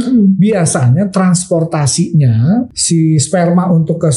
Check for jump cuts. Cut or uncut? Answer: cut